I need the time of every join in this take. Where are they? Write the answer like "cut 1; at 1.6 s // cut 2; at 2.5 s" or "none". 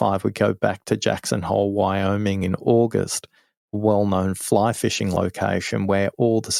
none